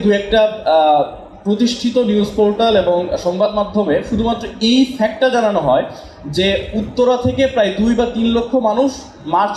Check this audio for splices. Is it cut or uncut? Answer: uncut